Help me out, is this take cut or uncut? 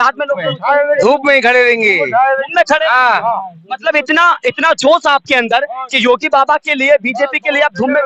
uncut